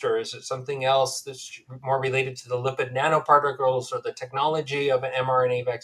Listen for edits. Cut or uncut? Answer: uncut